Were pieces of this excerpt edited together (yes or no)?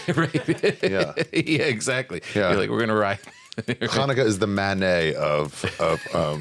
no